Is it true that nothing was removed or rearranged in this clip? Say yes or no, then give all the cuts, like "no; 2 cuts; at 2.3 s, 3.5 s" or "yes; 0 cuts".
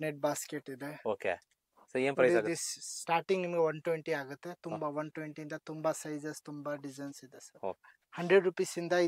yes; 0 cuts